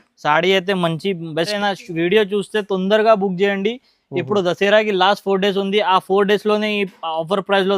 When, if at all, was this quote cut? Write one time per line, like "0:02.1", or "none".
0:01.6